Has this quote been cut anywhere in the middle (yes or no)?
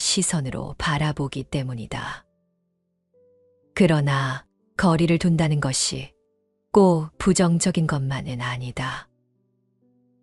yes